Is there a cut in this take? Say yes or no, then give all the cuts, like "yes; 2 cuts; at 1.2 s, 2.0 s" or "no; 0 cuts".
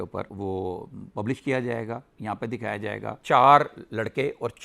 yes; 1 cut; at 3.2 s